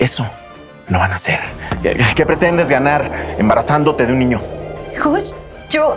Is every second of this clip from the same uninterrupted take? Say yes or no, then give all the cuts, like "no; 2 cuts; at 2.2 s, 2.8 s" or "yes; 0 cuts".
no; 1 cut; at 1.8 s